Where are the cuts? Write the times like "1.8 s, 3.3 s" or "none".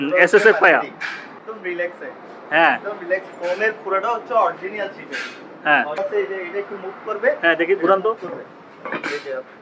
1.5 s, 6.0 s